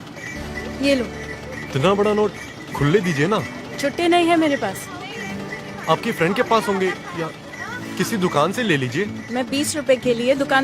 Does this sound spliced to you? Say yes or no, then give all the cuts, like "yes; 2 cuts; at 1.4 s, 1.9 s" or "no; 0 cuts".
yes; 1 cut; at 1.7 s